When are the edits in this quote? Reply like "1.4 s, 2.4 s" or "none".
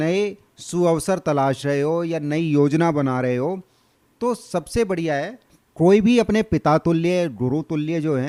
none